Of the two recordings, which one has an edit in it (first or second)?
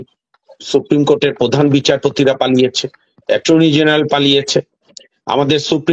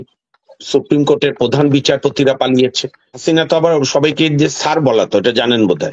second